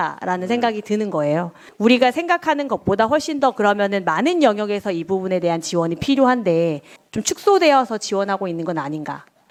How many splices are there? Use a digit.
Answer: 0